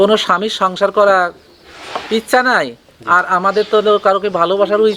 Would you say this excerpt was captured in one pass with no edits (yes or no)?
yes